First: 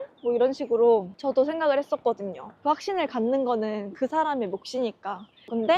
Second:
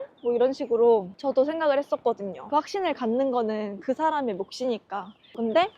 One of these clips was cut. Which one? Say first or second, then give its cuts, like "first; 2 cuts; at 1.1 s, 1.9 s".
second; 1 cut; at 2.3 s